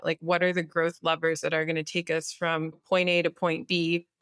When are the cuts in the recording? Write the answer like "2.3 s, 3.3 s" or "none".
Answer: 2.8 s